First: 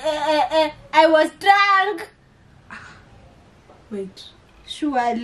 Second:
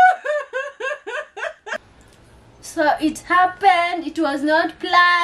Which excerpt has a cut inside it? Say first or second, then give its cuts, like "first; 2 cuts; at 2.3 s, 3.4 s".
second; 1 cut; at 1.7 s